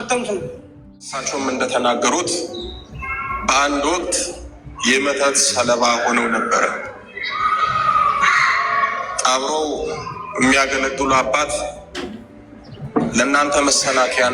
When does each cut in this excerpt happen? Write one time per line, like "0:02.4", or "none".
0:01.2